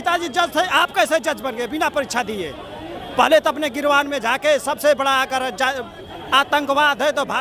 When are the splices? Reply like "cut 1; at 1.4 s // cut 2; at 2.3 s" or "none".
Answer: none